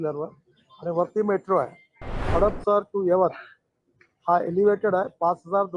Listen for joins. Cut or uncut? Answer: cut